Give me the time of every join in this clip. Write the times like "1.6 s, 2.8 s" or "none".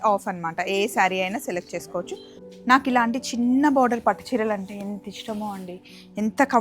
2.3 s

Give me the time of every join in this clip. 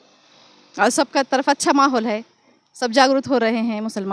none

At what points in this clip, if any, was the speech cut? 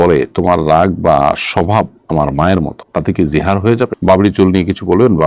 4.0 s

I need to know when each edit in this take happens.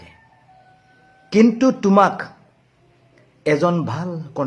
none

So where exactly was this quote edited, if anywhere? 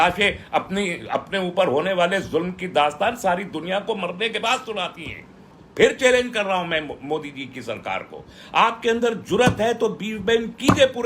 5.6 s

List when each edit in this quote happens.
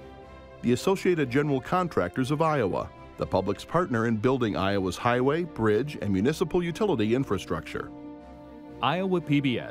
none

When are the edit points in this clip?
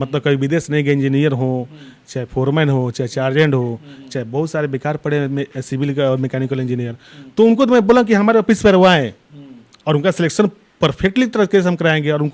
none

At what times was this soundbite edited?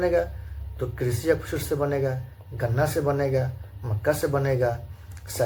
none

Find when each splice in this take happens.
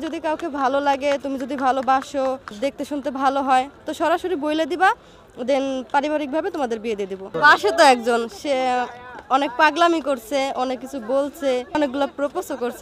2.5 s, 7.3 s, 11.8 s

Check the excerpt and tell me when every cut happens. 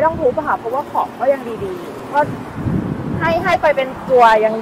2.0 s

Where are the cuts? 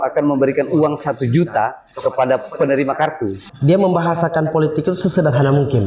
3.4 s

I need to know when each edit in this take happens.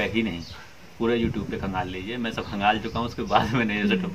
none

